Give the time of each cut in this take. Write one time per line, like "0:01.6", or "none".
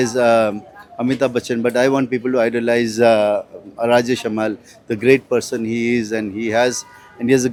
none